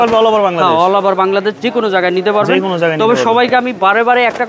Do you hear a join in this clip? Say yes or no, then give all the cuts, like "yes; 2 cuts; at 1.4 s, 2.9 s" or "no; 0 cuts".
no; 0 cuts